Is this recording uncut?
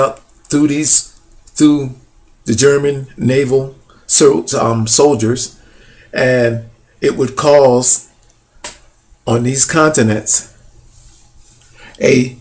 no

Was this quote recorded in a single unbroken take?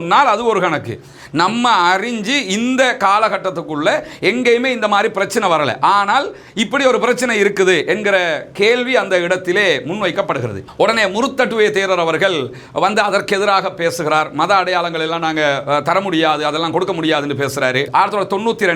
no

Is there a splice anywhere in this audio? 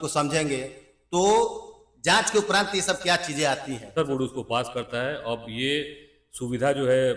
yes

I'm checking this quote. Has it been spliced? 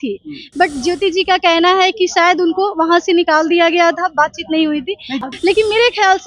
yes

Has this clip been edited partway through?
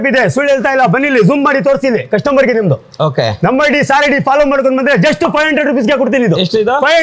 no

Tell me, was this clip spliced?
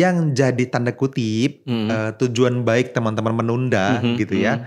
no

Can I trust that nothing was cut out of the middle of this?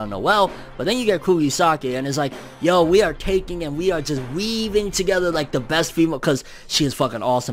yes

